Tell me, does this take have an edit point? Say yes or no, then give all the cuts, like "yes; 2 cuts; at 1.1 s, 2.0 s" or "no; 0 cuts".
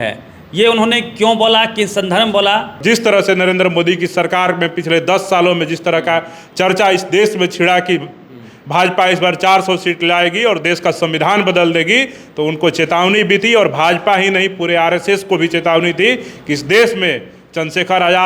yes; 1 cut; at 2.8 s